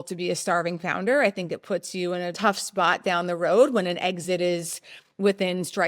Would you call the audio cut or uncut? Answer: cut